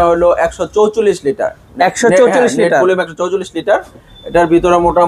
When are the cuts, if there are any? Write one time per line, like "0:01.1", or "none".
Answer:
none